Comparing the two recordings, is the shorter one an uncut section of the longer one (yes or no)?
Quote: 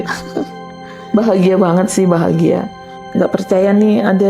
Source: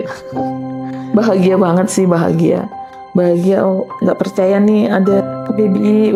no